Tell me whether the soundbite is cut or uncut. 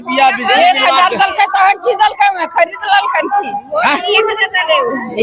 uncut